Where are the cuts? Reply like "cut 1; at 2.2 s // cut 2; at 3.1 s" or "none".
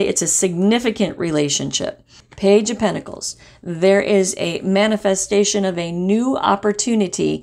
cut 1; at 2.2 s